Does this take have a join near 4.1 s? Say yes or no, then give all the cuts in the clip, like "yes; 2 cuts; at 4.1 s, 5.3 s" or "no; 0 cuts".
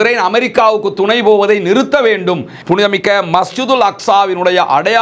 no; 1 cut; at 2.5 s